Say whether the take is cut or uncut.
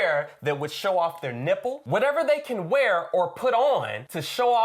cut